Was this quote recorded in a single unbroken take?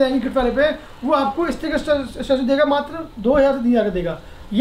yes; 0 cuts

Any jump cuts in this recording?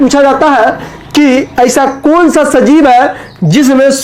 no; 0 cuts

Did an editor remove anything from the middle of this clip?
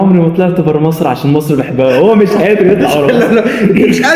no; 0 cuts

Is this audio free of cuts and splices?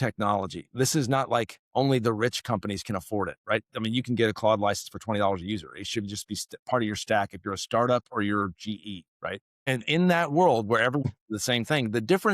no; 2 cuts; at 9.5 s, 11.0 s

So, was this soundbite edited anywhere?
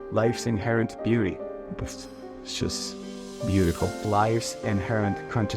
yes; 1 cut; at 4.0 s

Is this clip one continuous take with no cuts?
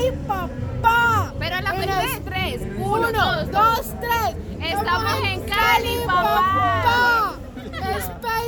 yes; 0 cuts

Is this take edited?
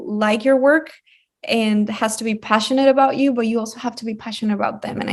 no; 0 cuts

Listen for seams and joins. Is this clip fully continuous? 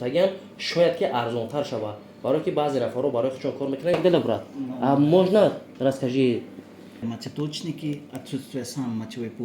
no; 2 cuts; at 3.9 s, 7.0 s

